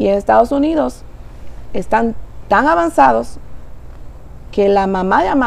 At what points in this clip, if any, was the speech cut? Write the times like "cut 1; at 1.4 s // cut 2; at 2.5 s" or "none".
none